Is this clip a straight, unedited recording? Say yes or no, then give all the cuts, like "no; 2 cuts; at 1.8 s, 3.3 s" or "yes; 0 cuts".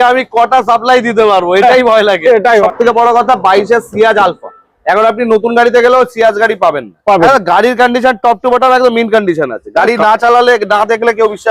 no; 2 cuts; at 2.6 s, 7.2 s